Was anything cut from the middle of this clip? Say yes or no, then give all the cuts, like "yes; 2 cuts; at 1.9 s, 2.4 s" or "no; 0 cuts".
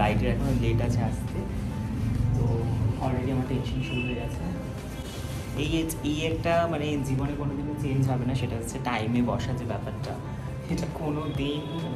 no; 0 cuts